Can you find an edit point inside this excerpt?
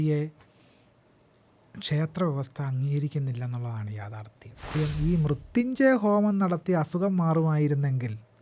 yes; 1 cut; at 4.8 s

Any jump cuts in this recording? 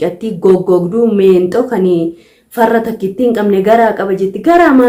no; 0 cuts

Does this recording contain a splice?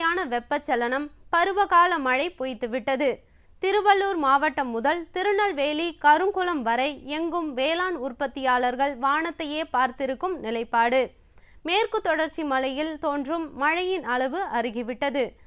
no; 0 cuts

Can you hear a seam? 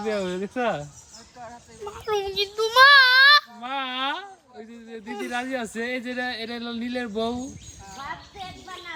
no; 0 cuts

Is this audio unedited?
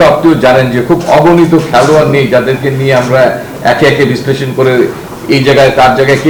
yes; 0 cuts

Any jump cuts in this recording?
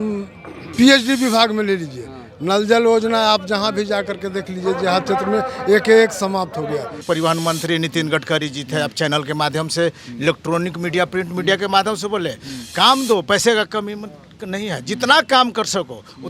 yes; 1 cut; at 7.0 s

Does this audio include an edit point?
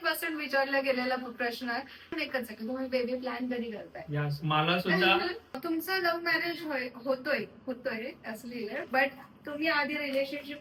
yes; 2 cuts; at 2.0 s, 5.6 s

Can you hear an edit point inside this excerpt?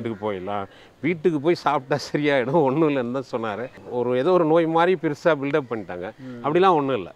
yes; 1 cut; at 3.8 s

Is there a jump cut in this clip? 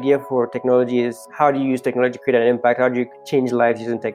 yes; 2 cuts; at 1.2 s, 3.2 s

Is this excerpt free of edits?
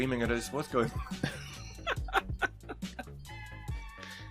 yes; 0 cuts

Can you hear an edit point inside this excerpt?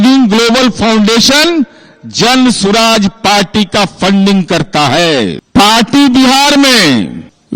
yes; 1 cut; at 5.4 s

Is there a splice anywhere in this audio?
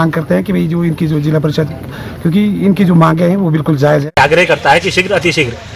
yes; 1 cut; at 4.1 s

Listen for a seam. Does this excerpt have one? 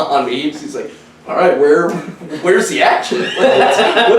no; 0 cuts

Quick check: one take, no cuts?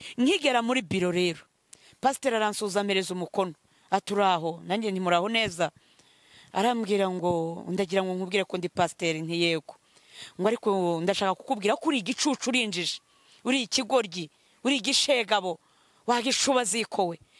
yes; 0 cuts

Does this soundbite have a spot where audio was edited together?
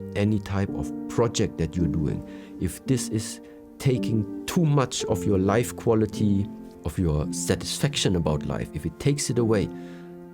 yes; 1 cut; at 6.8 s

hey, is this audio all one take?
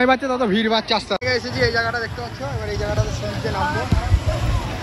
yes; 0 cuts

